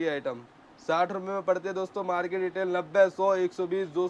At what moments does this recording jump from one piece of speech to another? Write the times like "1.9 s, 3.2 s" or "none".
none